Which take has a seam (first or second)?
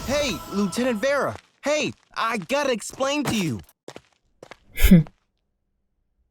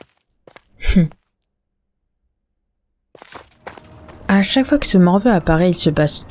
second